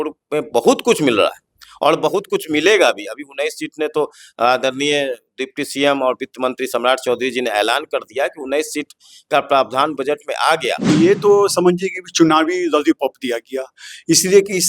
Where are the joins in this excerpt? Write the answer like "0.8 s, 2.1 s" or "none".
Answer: 10.9 s